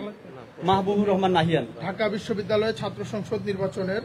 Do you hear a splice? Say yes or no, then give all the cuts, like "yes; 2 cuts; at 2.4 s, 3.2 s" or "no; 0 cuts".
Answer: yes; 1 cut; at 1.7 s